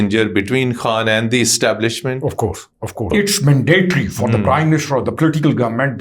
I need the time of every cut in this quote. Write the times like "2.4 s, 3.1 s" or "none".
3.1 s